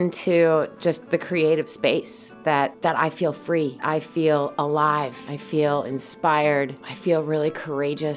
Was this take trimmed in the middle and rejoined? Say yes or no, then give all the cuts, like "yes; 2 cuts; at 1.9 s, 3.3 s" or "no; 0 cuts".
yes; 4 cuts; at 2.8 s, 3.8 s, 5.3 s, 6.9 s